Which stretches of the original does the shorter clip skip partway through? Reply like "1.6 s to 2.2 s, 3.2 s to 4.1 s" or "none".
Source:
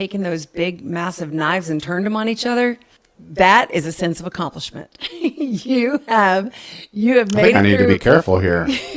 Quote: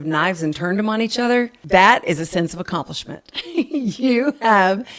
2.8 s to 3.2 s